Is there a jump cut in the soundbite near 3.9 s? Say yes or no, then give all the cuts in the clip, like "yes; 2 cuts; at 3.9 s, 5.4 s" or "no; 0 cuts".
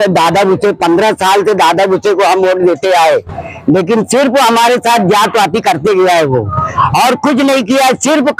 no; 0 cuts